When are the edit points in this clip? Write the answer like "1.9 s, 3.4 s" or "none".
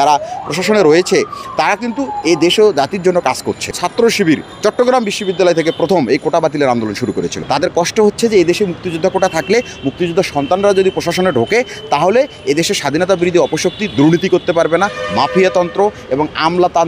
3.7 s, 7.4 s